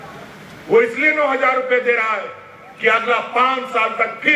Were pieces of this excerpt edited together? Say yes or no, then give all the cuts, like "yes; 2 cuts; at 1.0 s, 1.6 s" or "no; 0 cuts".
no; 0 cuts